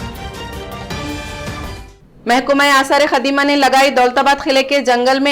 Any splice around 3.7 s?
no; 1 cut; at 1.9 s

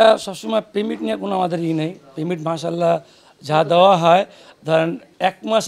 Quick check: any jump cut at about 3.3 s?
no; 0 cuts

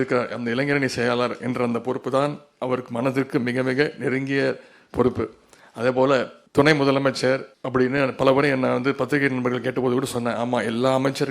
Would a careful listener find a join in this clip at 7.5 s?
yes; 2 cuts; at 6.4 s, 7.5 s

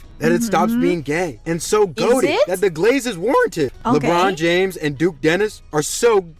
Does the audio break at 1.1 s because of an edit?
no; 1 cut; at 3.7 s

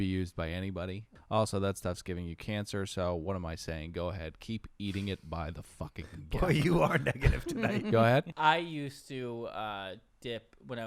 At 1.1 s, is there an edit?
yes; 2 cuts; at 1.1 s, 8.3 s

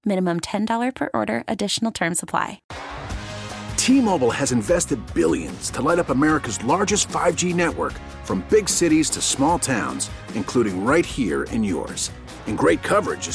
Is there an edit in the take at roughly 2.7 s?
yes; 1 cut; at 2.7 s

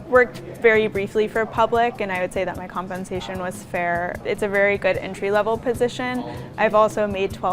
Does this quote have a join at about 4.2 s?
yes; 2 cuts; at 4.2 s, 6.4 s

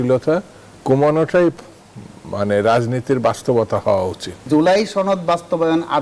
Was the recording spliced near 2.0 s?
no; 1 cut; at 4.4 s

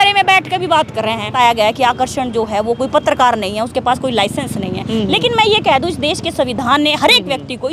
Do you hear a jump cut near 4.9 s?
no; 1 cut; at 1.3 s

